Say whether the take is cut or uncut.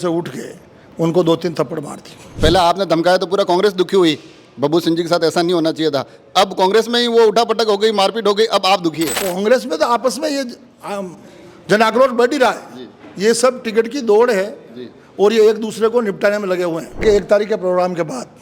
cut